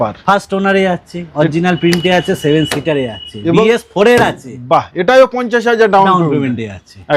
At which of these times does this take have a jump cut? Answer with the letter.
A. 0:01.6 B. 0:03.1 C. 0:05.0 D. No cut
D